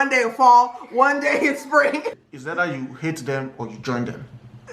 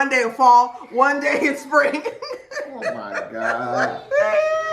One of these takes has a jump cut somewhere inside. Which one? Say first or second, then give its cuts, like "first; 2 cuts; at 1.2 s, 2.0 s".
first; 1 cut; at 2.2 s